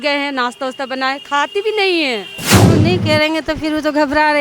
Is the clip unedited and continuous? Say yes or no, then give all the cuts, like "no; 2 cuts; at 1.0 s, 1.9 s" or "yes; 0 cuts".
no; 1 cut; at 2.5 s